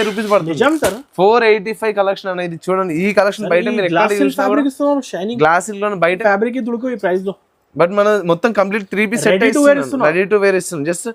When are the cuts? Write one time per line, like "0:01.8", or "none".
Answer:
0:06.2